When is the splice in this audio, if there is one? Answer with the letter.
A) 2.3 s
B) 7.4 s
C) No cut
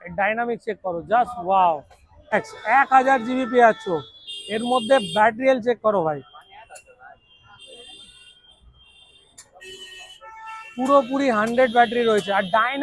A